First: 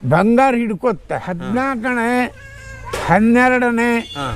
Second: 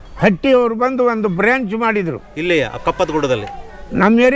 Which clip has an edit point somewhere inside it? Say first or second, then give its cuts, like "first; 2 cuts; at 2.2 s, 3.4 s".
first; 1 cut; at 1.3 s